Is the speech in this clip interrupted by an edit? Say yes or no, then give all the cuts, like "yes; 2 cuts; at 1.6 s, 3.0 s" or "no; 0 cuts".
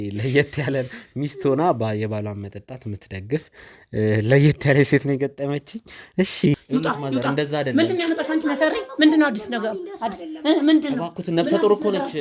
yes; 1 cut; at 6.6 s